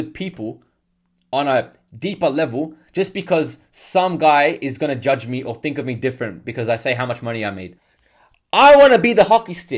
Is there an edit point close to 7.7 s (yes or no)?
yes